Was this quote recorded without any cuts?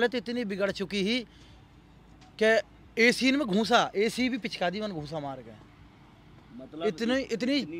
yes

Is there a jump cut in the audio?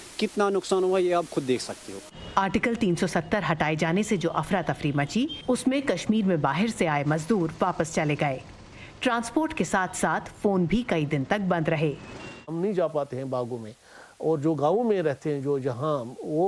no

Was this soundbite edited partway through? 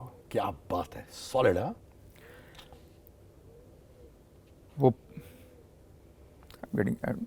no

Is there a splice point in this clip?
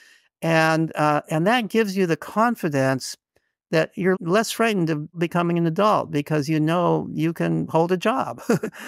yes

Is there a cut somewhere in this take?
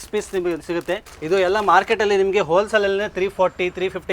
yes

